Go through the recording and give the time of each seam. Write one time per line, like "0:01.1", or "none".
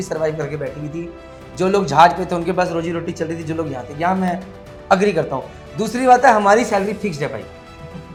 none